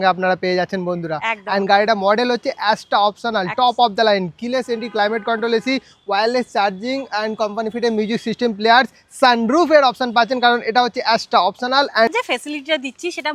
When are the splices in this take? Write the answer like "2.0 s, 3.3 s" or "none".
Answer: 12.1 s